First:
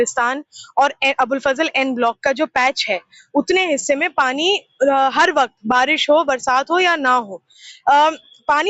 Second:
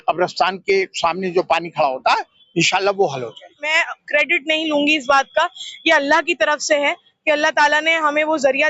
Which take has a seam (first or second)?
second